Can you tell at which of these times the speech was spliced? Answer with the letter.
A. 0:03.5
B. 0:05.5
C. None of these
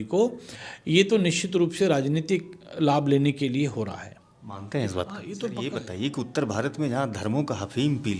B